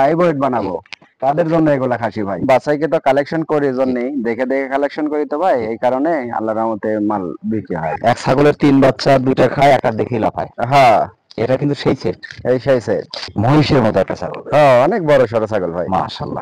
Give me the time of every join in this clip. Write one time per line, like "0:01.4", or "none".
0:02.4
0:08.0
0:13.3